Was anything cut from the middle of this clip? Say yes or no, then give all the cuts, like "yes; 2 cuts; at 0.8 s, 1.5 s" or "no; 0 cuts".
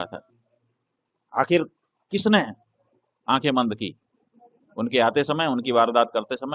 no; 0 cuts